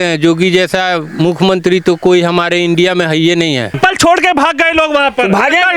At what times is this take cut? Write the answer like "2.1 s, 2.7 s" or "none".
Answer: 3.7 s

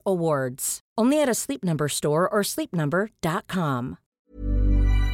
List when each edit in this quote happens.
4.0 s

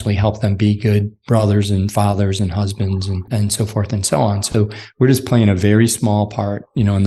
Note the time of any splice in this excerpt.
3.3 s

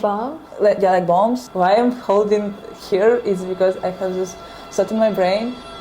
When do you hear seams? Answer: 1.4 s

